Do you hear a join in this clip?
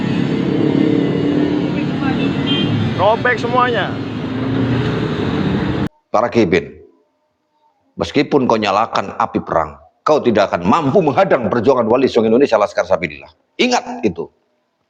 yes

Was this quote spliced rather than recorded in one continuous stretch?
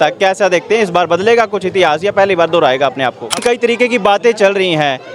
yes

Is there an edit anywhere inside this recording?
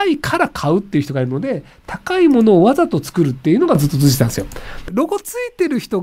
yes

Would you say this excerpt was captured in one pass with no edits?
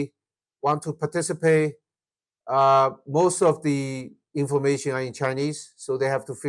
yes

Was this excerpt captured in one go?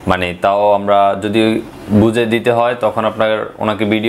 yes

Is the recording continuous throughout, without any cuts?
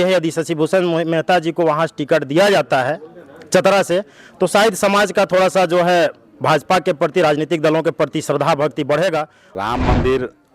no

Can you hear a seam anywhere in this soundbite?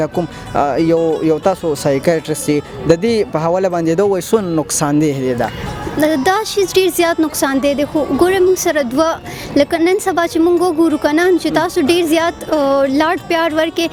no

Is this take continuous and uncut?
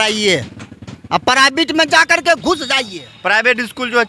no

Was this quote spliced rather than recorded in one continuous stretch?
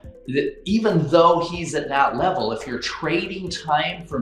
no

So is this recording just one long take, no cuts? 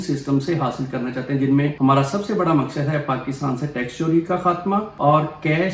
no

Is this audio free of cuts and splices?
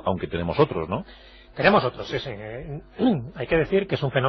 yes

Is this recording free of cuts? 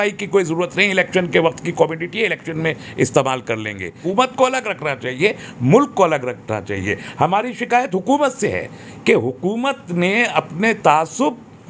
no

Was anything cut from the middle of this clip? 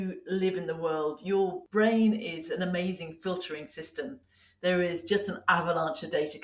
yes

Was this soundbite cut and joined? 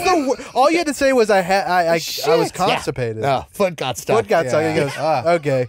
no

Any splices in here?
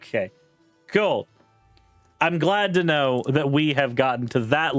no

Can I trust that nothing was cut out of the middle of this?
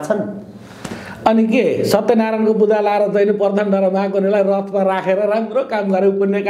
yes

